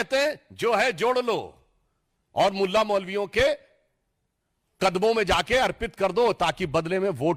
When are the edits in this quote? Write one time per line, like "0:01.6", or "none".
none